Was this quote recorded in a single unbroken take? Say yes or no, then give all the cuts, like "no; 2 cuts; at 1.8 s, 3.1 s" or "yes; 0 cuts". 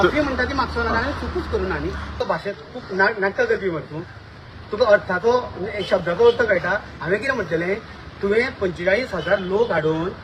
no; 1 cut; at 2.1 s